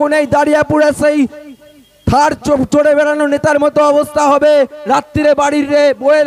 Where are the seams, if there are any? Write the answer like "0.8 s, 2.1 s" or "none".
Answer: none